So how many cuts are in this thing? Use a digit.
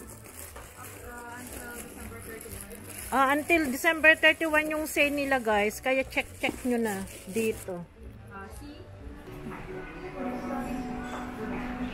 1